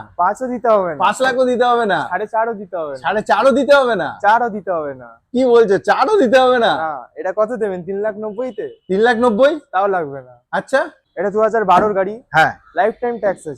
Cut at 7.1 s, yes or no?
no